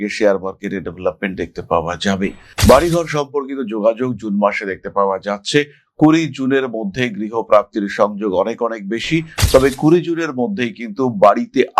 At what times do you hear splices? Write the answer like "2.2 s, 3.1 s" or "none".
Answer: 2.5 s